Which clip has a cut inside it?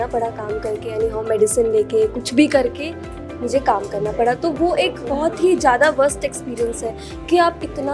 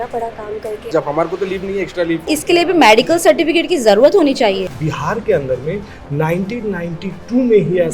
second; 3 cuts; at 0.9 s, 2.3 s, 4.7 s

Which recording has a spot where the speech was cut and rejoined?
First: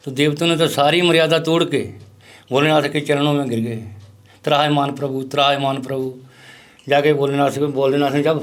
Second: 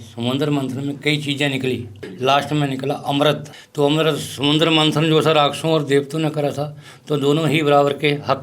second; 2 cuts; at 2.0 s, 3.6 s

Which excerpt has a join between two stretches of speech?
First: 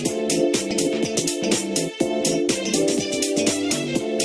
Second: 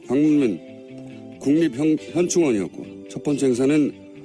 first; 1 cut; at 2.6 s

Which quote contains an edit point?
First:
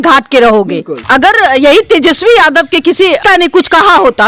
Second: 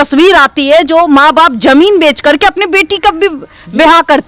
first; 2 cuts; at 0.9 s, 3.2 s

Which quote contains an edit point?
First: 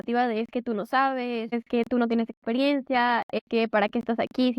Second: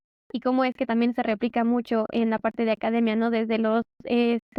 first; 2 cuts; at 1.5 s, 3.4 s

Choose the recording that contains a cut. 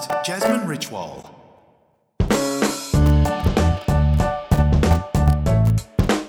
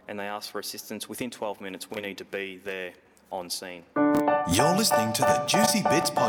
second; 1 cut; at 3.8 s

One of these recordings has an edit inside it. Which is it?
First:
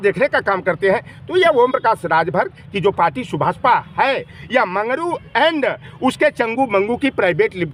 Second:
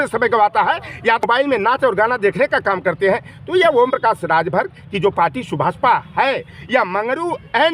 second; 1 cut; at 1.2 s

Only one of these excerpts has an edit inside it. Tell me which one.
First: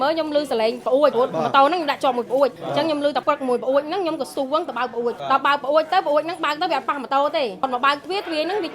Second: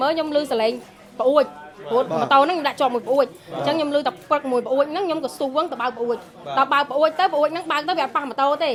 first; 4 cuts; at 0.9 s, 2.9 s, 5.2 s, 7.6 s

